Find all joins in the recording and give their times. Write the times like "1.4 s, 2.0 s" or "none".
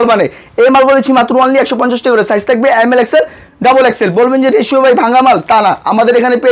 none